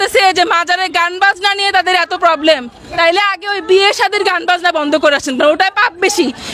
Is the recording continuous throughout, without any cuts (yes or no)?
yes